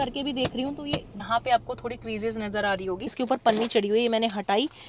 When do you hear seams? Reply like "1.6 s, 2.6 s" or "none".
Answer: 1.2 s, 3.2 s